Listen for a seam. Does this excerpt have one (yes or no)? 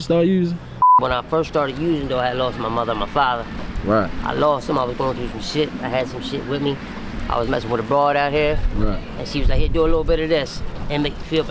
yes